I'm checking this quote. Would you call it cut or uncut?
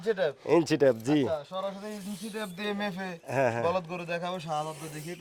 uncut